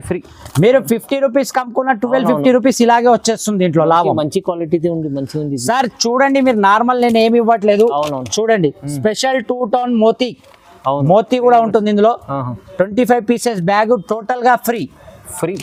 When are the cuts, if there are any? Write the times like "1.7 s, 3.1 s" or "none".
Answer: none